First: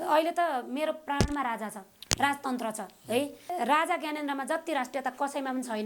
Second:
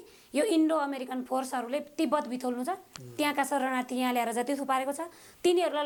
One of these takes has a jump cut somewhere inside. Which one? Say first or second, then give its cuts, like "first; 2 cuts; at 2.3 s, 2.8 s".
first; 1 cut; at 3.4 s